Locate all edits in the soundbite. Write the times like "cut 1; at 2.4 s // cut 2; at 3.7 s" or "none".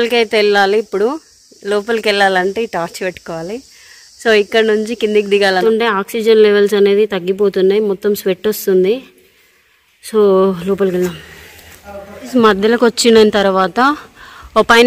cut 1; at 5.6 s